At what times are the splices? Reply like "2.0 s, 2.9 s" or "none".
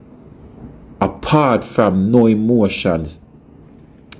none

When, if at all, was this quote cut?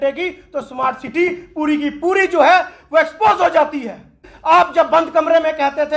4.3 s

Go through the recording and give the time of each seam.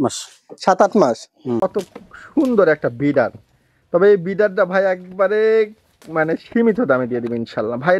1.7 s

